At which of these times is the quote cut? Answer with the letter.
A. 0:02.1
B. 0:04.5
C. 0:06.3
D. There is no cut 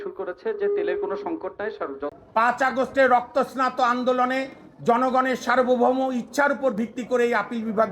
A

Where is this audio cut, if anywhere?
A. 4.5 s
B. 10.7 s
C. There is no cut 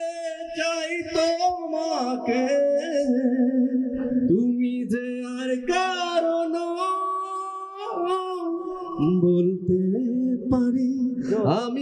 C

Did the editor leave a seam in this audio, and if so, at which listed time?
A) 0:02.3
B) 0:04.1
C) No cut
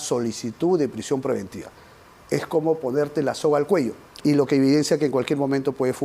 B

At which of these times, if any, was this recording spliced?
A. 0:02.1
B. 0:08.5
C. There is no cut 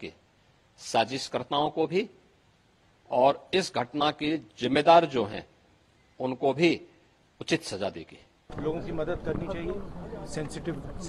B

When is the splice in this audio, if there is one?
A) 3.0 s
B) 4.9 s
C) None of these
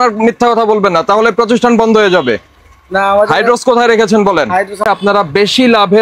B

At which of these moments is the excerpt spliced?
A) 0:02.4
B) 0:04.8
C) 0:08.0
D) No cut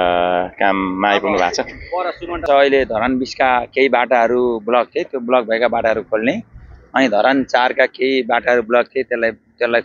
A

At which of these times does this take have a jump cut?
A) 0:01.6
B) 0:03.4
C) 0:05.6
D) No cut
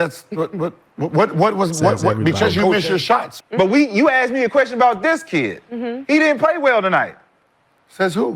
B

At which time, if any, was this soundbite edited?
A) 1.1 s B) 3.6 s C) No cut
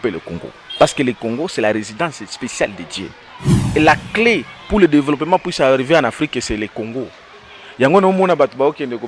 B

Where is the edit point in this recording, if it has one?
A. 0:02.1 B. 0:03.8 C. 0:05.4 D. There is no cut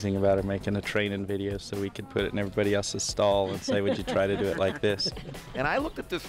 C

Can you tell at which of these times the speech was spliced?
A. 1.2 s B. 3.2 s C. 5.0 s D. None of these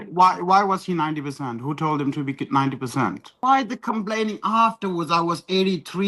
B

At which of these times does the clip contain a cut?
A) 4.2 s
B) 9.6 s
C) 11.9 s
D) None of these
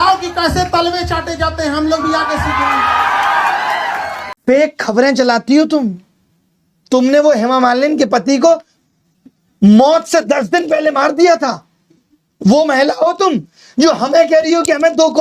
A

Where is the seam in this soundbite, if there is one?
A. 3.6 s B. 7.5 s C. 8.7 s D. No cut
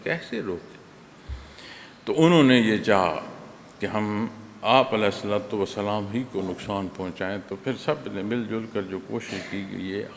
B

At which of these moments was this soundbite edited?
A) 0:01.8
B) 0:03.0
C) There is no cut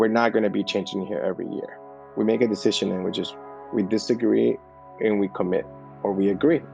C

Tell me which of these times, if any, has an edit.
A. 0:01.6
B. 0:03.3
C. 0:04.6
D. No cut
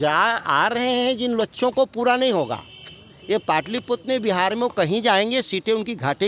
D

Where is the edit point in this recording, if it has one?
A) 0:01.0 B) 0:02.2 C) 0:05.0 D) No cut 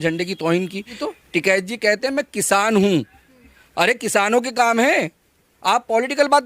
A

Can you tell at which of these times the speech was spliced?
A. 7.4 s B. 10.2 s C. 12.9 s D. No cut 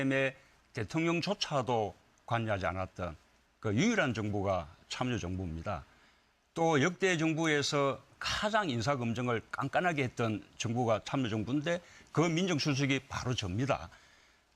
A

